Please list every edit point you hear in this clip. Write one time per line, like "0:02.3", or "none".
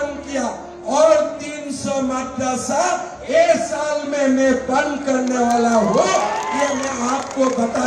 none